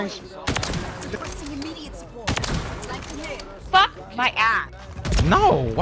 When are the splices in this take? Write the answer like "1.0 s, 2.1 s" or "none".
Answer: none